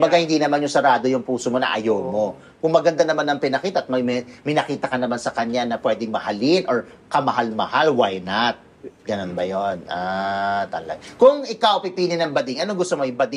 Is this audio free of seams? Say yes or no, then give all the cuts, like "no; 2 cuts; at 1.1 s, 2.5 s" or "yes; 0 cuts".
yes; 0 cuts